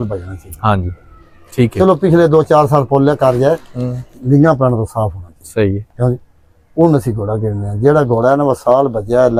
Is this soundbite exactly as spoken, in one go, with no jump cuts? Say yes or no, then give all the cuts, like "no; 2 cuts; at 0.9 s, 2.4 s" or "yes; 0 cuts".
yes; 0 cuts